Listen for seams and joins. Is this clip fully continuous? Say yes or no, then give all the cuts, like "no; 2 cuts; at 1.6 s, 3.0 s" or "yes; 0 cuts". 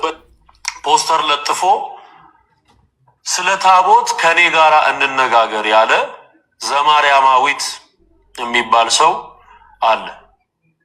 yes; 0 cuts